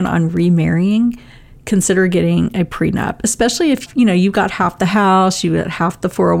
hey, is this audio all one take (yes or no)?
no